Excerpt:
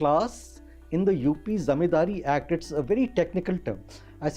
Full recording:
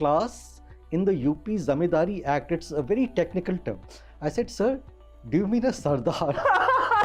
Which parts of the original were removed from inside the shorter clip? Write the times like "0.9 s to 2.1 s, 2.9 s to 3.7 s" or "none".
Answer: none

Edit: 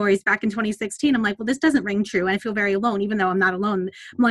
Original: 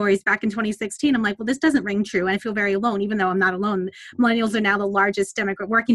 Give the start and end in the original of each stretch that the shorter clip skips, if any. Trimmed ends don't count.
none

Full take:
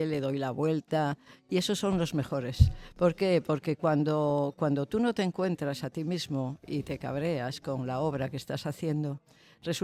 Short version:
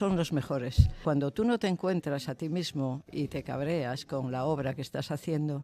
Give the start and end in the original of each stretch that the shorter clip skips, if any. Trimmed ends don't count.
2.8 s to 4.5 s

